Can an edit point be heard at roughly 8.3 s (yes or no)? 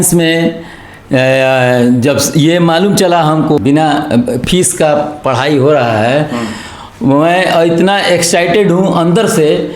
no